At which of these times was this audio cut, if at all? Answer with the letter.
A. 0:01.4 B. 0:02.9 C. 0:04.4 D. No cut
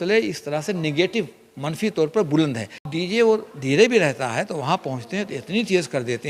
B